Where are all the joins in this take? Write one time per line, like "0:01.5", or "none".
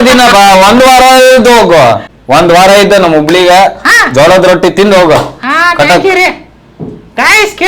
0:02.1